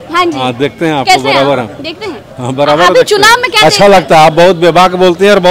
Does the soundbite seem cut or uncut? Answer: uncut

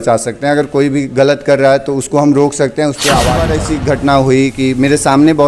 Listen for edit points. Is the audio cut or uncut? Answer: cut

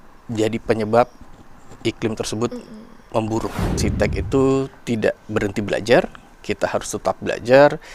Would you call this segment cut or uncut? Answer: cut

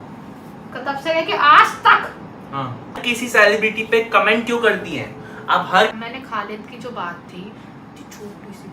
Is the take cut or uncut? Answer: cut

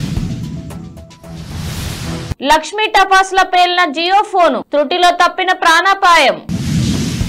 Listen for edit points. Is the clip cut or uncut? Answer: uncut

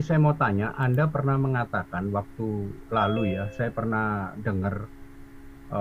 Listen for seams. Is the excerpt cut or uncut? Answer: uncut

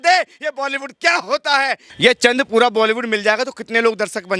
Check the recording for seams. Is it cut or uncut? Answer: cut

